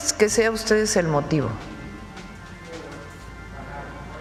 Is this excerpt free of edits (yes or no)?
yes